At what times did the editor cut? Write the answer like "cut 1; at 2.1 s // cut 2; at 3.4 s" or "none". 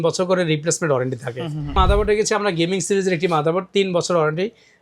cut 1; at 1.7 s